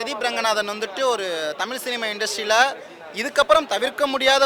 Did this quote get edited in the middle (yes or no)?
no